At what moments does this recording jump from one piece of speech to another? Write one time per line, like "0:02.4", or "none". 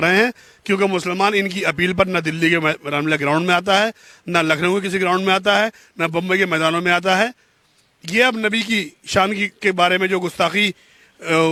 none